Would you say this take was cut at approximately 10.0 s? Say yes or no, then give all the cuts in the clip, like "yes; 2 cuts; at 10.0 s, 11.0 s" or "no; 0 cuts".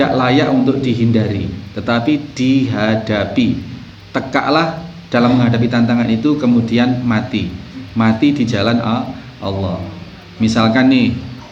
no; 0 cuts